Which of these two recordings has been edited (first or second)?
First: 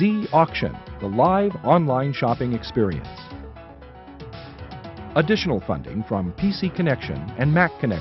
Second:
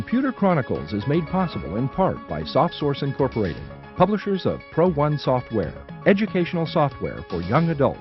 first